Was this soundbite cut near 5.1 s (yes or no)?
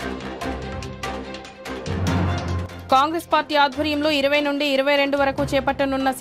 no